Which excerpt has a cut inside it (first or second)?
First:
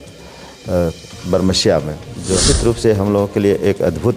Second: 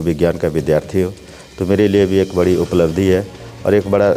first